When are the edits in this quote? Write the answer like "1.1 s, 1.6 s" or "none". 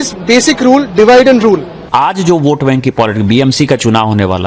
1.8 s